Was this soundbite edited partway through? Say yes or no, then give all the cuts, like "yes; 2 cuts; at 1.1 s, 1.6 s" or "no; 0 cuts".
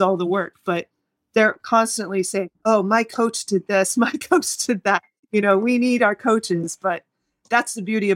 no; 0 cuts